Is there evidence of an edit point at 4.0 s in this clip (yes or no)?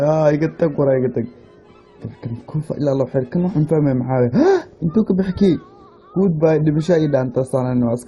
yes